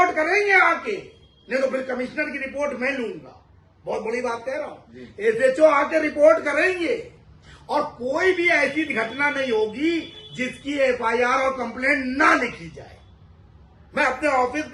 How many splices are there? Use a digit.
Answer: 0